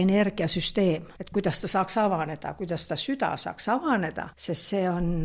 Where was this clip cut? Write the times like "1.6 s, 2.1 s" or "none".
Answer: 1.1 s, 4.3 s